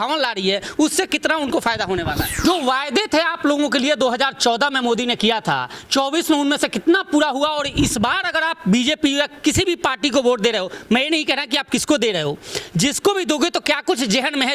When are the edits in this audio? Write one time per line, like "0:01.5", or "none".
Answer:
0:02.4